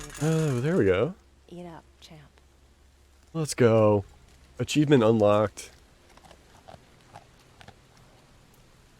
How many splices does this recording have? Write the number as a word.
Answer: zero